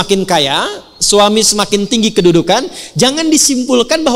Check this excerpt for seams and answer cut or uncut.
uncut